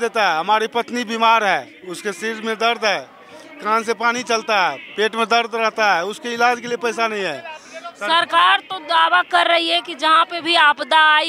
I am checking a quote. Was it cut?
no; 0 cuts

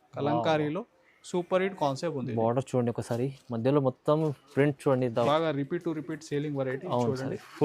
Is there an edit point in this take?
yes; 1 cut; at 5.3 s

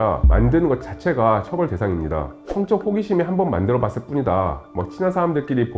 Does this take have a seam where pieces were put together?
yes; 1 cut; at 2.4 s

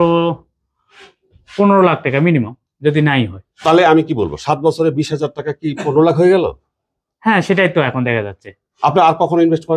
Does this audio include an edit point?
no; 0 cuts

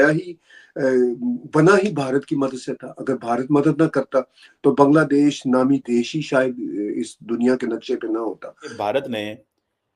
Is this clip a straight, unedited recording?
no; 1 cut; at 8.8 s

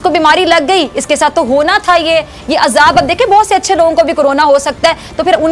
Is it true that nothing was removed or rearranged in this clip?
yes; 0 cuts

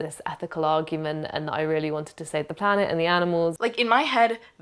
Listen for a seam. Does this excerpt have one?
yes; 1 cut; at 3.6 s

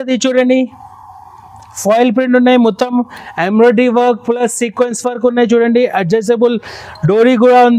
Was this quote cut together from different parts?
no; 0 cuts

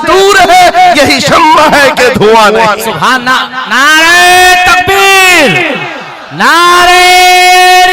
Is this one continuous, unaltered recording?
yes; 0 cuts

